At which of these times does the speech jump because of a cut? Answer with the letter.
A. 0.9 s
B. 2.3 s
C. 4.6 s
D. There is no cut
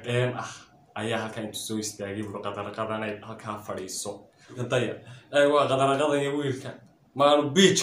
C